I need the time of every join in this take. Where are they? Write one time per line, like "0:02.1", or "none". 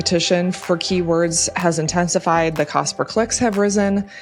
none

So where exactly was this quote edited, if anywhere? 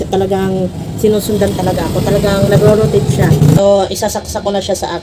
0:03.6

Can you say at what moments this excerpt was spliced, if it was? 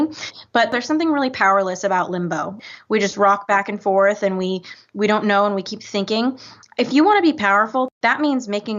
0:00.7
0:02.6
0:07.9

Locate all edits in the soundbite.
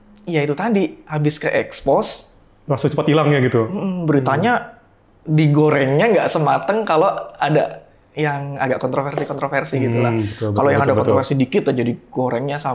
none

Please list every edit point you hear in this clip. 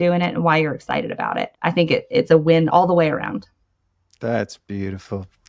0:02.7

